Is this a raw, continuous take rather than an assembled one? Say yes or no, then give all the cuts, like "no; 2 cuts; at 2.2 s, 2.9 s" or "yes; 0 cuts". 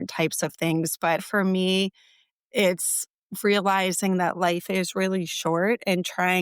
no; 1 cut; at 1.2 s